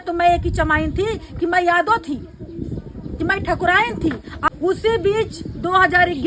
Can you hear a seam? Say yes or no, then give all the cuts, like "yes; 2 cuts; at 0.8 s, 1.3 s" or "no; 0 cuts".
yes; 1 cut; at 4.5 s